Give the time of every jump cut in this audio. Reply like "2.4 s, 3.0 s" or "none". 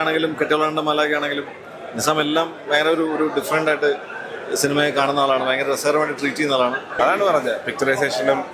6.9 s